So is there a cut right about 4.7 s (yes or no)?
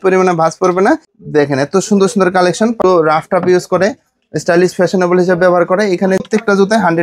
no